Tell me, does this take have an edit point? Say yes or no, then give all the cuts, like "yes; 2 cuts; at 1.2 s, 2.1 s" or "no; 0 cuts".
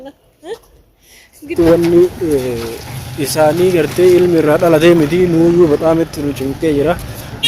yes; 1 cut; at 1.5 s